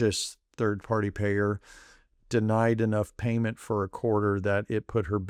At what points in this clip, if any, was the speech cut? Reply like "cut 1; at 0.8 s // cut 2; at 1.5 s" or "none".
none